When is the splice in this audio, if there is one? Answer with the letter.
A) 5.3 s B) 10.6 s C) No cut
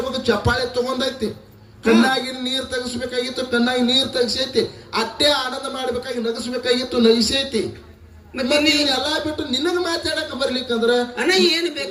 C